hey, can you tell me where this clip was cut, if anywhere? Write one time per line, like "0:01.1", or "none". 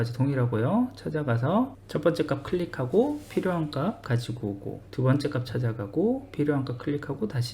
0:01.8
0:04.8